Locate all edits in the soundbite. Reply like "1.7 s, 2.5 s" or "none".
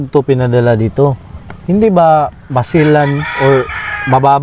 none